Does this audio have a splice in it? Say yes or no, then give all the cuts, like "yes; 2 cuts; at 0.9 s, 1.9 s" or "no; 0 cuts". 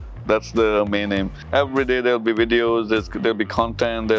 yes; 1 cut; at 1.4 s